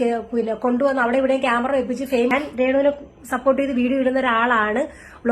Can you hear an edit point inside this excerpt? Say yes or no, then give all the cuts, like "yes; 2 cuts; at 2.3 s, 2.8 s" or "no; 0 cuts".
yes; 1 cut; at 2.3 s